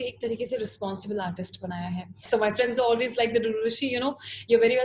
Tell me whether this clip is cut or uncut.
cut